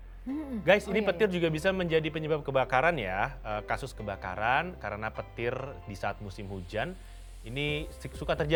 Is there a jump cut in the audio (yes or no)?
no